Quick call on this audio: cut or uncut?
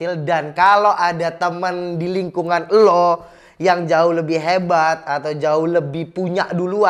uncut